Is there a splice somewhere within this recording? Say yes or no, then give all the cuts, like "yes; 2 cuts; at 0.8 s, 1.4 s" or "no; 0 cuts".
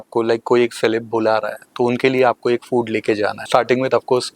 yes; 1 cut; at 3.4 s